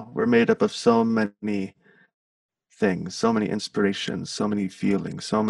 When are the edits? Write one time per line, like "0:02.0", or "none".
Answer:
none